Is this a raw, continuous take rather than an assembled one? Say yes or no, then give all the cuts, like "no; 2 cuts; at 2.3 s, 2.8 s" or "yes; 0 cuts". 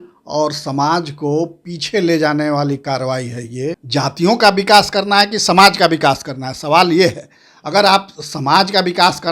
no; 1 cut; at 3.8 s